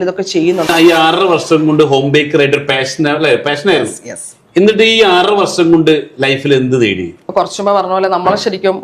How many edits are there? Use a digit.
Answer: 2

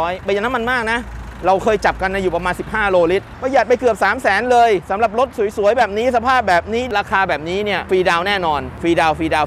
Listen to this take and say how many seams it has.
2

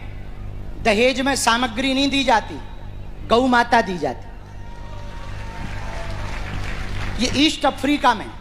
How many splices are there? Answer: 0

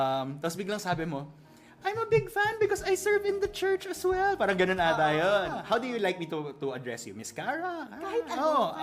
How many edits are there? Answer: 1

